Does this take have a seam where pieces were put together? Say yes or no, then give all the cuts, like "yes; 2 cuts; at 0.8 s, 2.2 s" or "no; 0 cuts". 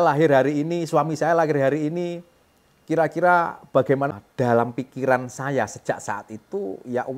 yes; 1 cut; at 4.1 s